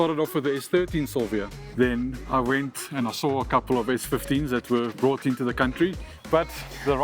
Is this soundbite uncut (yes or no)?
no